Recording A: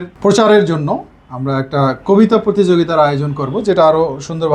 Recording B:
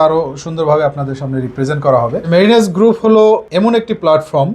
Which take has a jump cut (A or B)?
B